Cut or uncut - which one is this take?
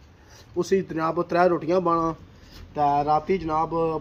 uncut